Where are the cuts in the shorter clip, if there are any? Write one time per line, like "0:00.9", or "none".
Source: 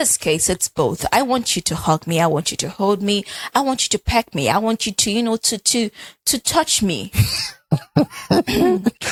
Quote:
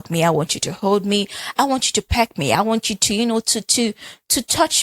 none